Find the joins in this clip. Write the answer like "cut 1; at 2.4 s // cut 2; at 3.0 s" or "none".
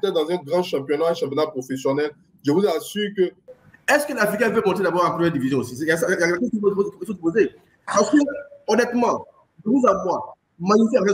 cut 1; at 3.4 s